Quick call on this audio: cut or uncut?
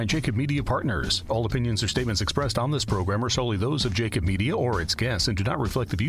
cut